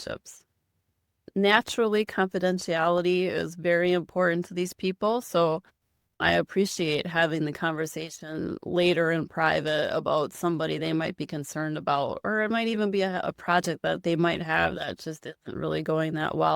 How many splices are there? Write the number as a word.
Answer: one